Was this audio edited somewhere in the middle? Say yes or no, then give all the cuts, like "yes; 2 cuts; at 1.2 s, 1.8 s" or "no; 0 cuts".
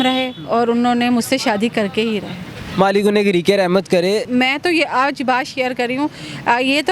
yes; 1 cut; at 4.3 s